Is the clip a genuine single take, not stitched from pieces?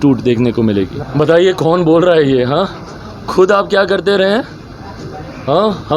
no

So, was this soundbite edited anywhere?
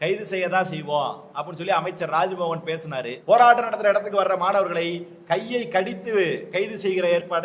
yes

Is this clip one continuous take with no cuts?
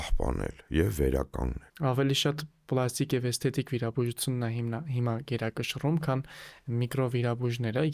no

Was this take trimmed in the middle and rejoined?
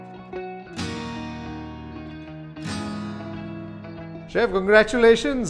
yes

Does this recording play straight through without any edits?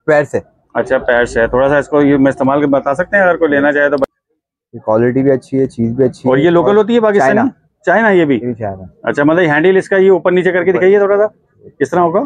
no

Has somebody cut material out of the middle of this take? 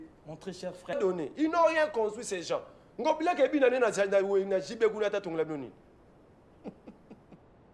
yes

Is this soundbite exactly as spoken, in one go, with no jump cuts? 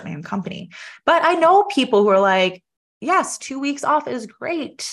yes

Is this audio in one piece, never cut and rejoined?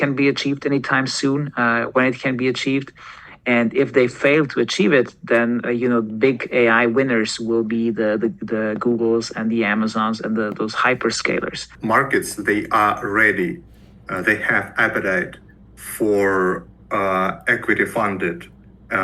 no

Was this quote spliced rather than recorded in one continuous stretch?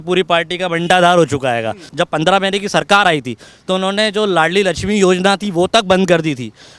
yes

